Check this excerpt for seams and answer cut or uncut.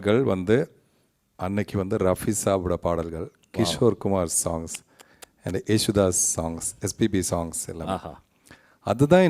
uncut